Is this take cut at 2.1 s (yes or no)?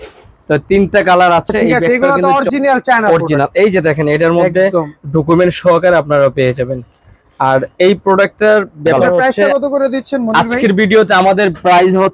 yes